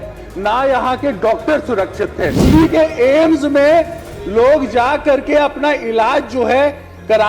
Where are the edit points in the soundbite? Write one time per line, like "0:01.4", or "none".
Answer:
0:02.4